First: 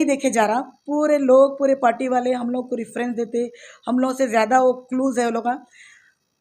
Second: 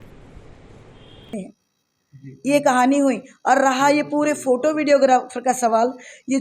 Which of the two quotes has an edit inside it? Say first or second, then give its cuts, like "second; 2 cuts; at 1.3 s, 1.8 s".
second; 1 cut; at 1.1 s